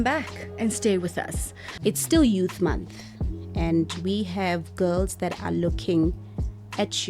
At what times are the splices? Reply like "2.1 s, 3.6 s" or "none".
1.7 s